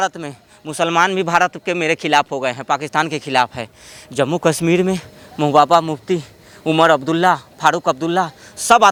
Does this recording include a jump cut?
no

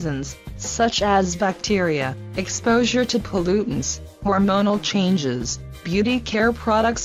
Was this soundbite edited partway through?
no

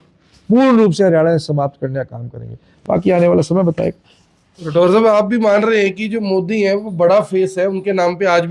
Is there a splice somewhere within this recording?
yes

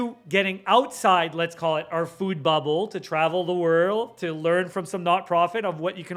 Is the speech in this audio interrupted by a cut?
no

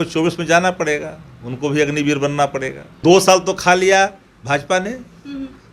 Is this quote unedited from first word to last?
no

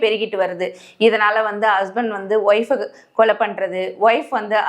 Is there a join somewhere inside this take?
no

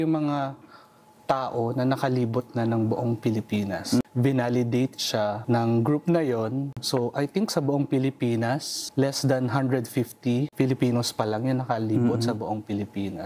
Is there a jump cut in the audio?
yes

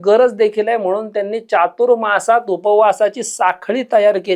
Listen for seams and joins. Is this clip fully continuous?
yes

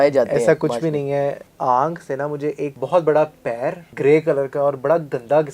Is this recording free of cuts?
no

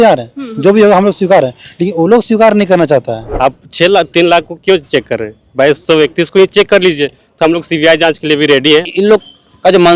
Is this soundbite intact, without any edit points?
no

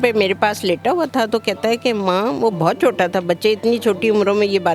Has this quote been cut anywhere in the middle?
no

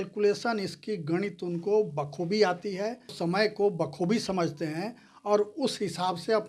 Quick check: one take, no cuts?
no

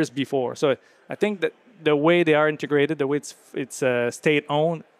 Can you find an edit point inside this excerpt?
no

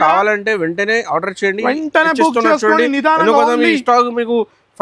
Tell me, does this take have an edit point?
no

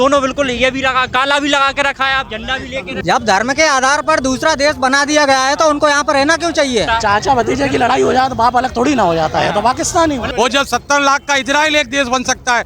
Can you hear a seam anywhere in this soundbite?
yes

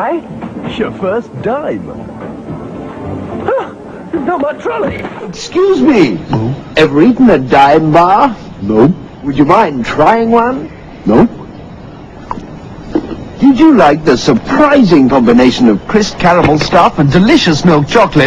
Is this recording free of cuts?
yes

